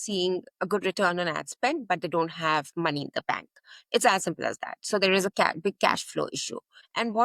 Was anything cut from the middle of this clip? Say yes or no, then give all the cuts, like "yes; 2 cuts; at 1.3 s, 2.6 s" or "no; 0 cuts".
no; 0 cuts